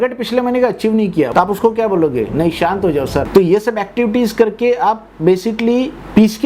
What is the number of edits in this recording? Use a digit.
2